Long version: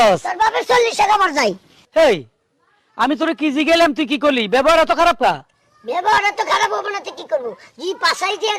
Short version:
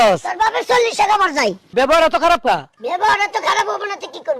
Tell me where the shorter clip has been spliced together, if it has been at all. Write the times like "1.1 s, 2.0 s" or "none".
1.7 s, 2.7 s